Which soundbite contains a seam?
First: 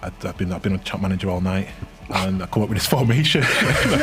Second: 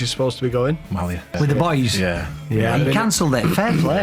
second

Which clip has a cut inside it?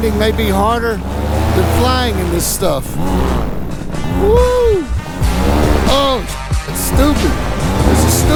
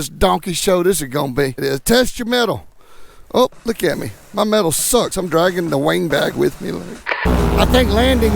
second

